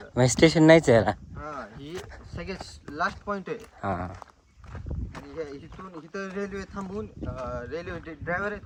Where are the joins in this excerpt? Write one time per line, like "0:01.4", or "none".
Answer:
none